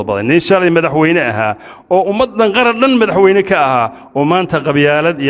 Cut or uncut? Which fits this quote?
uncut